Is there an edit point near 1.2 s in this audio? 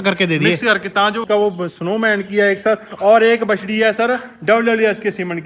yes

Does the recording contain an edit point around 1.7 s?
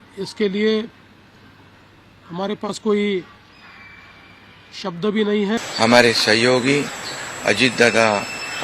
no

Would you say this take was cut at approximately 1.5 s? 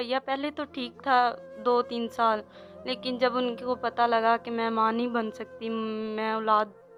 no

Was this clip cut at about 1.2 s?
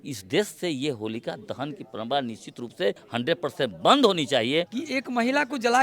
no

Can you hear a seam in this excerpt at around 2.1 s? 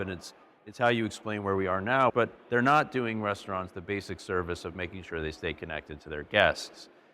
yes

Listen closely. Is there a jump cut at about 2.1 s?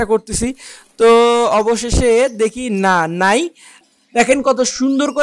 no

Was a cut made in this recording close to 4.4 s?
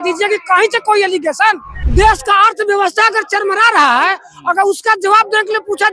no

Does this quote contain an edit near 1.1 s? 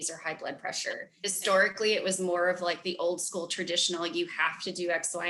yes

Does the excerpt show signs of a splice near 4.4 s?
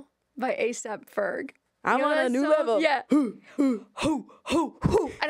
no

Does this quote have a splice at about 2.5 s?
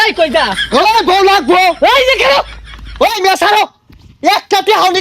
yes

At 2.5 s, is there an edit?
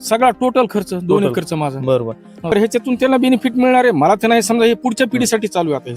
yes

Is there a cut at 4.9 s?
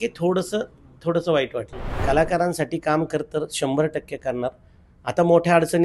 no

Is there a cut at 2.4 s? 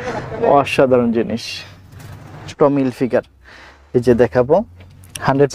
yes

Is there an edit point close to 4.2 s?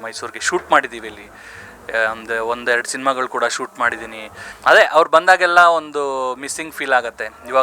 no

